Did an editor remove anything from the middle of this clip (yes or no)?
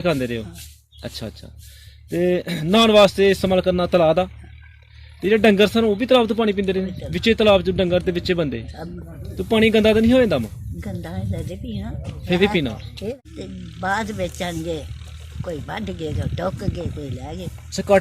yes